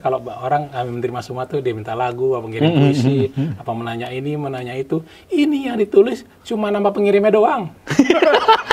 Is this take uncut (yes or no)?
yes